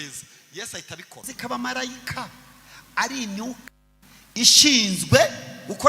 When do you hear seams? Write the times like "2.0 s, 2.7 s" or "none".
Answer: 1.3 s